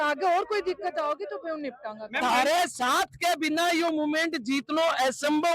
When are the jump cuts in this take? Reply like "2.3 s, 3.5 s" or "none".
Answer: 2.2 s